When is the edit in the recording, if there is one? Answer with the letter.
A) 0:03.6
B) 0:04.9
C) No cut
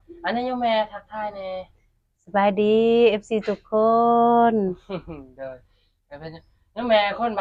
C